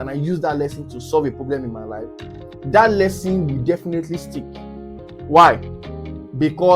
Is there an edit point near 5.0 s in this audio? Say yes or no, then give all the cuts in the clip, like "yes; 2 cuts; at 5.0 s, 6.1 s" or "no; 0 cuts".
yes; 1 cut; at 5.0 s